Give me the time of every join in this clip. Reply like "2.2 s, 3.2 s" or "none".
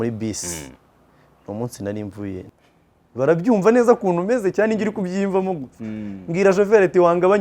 2.4 s